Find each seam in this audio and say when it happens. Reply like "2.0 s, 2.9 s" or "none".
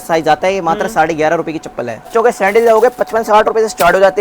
2.1 s